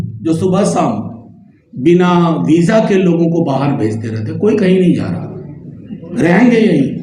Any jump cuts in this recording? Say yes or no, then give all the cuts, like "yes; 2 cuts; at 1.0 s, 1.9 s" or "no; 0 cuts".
no; 0 cuts